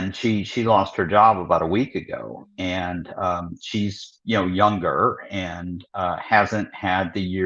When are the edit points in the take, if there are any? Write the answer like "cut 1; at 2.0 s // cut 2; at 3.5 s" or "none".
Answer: none